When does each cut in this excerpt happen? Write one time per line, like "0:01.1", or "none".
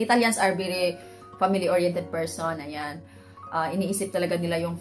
none